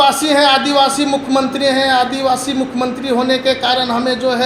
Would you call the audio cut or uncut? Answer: uncut